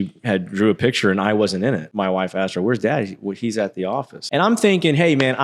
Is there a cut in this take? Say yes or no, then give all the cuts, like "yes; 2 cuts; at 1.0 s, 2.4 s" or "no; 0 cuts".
yes; 2 cuts; at 1.9 s, 4.2 s